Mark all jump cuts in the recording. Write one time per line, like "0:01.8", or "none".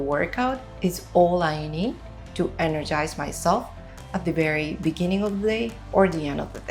none